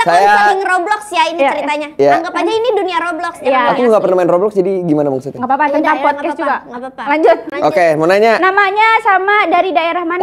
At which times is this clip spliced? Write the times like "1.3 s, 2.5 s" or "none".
none

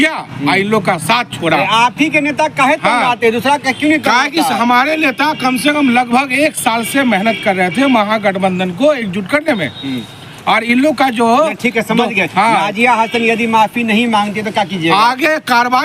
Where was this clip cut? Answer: none

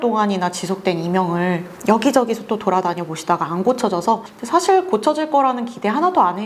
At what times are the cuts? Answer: 4.3 s

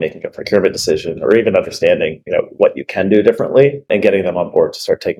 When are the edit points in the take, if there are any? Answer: 3.8 s

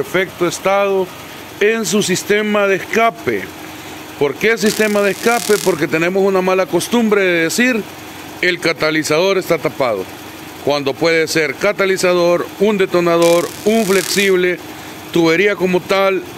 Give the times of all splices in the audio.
none

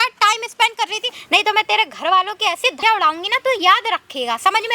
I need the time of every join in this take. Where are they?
1.2 s, 2.8 s

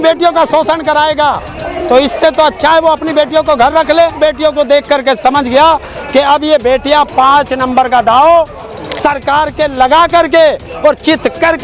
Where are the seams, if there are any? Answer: 4.1 s

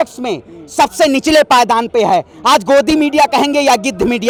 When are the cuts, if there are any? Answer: none

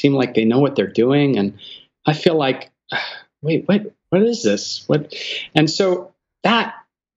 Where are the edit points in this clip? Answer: none

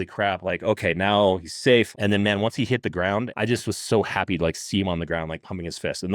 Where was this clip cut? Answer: 1.9 s, 3.3 s

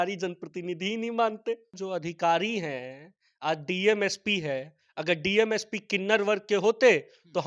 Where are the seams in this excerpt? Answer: 1.7 s

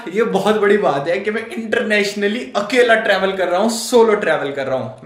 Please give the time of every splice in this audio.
none

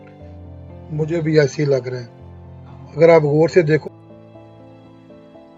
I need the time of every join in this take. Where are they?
3.8 s

